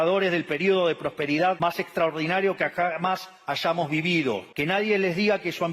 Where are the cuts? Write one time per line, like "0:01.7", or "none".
0:01.6
0:04.5